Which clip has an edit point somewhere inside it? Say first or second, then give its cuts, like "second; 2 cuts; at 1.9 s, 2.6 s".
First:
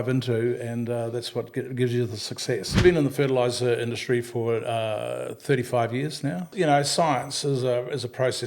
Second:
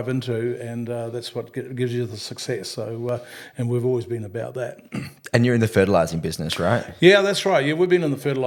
first; 2 cuts; at 2.8 s, 6.5 s